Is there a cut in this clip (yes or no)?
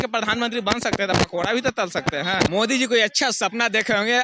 yes